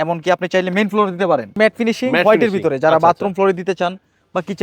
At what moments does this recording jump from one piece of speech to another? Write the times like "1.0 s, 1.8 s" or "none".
1.5 s

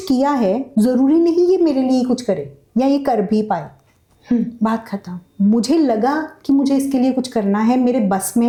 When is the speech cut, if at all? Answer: none

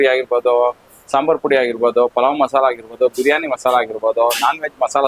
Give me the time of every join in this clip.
none

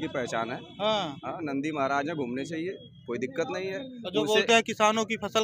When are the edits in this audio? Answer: none

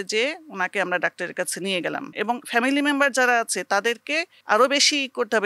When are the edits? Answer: 2.1 s, 4.3 s

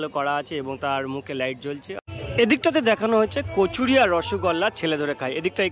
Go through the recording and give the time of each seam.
2.0 s

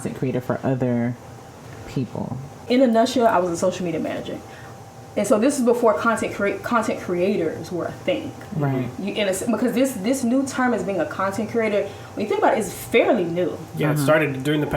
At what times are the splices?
2.6 s

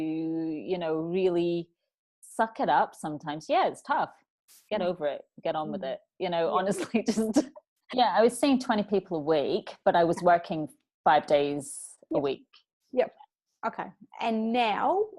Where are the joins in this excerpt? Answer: 7.8 s

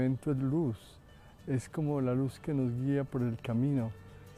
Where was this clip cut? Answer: none

